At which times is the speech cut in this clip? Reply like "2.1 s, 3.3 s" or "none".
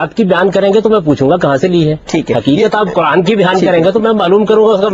none